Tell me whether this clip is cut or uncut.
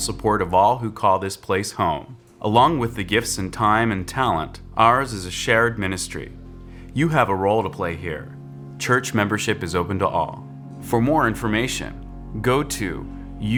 uncut